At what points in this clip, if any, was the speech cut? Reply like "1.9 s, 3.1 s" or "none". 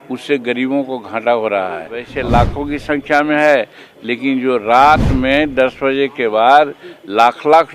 2.1 s